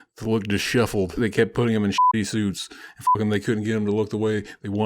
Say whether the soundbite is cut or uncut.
cut